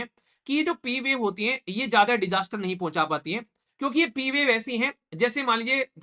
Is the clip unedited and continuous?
yes; 0 cuts

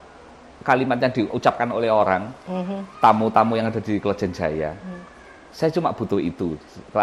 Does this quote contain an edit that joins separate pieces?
no; 0 cuts

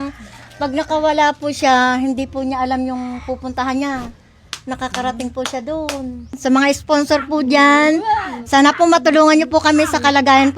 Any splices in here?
yes; 1 cut; at 6.3 s

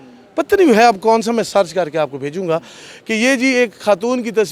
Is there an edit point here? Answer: no; 0 cuts

